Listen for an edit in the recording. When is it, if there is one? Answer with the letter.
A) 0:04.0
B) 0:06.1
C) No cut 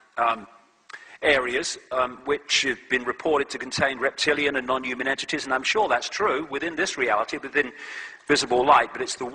A